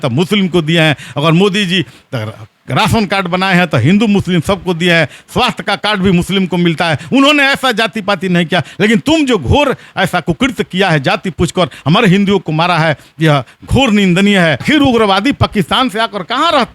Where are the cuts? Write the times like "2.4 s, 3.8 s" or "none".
14.6 s